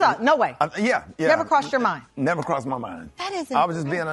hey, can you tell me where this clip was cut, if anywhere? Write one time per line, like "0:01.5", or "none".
0:02.0

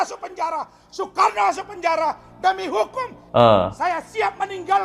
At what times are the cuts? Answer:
0:03.2

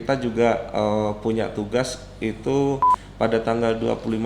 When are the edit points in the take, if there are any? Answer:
0:03.0

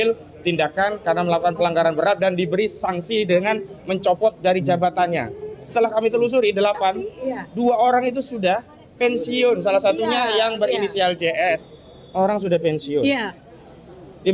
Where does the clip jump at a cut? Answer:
0:11.6

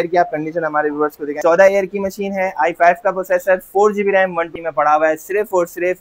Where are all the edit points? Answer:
0:01.4
0:04.5

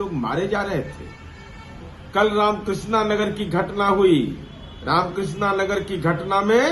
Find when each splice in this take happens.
none

